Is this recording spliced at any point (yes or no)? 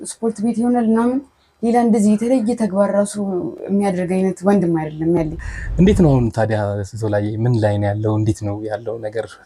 yes